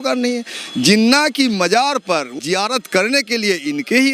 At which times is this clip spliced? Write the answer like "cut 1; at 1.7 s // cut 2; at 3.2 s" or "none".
cut 1; at 2.4 s